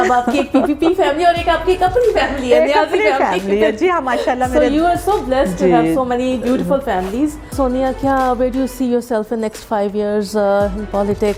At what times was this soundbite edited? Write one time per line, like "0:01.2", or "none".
none

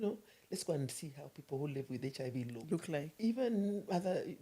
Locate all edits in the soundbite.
0:03.1

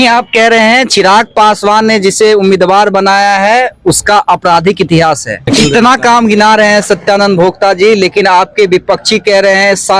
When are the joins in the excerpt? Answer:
0:05.5

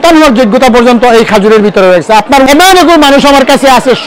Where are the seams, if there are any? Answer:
0:02.5

